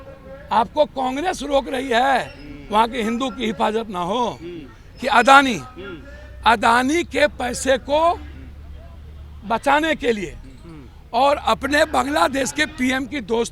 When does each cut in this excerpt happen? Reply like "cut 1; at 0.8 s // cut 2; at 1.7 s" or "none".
none